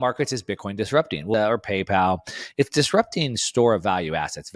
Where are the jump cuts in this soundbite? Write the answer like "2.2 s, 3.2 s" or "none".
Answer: 1.3 s

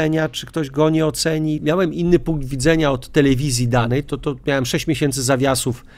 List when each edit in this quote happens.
1.6 s

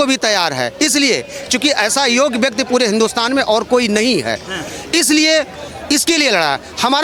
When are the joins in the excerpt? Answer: none

